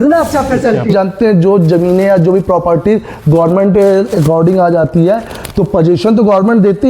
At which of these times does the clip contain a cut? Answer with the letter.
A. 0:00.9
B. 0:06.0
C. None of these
A